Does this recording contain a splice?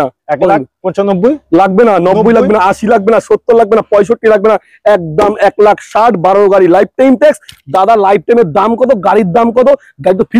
no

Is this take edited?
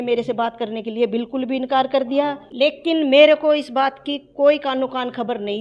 yes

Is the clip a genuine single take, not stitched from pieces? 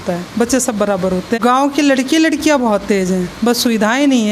no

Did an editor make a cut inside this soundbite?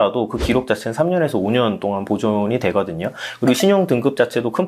no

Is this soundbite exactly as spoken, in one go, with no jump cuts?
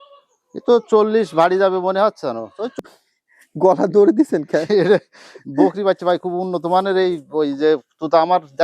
no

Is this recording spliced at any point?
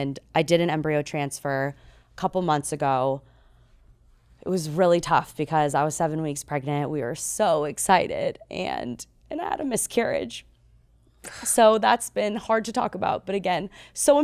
no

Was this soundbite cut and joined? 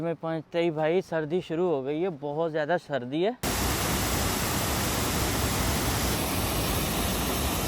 yes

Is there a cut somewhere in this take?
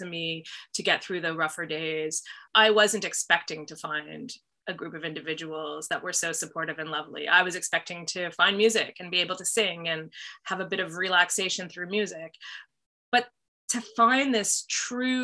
yes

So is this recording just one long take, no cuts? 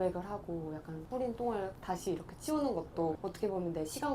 no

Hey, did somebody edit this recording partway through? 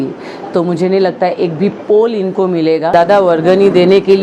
yes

